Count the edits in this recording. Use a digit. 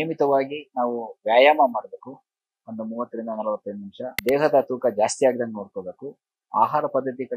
1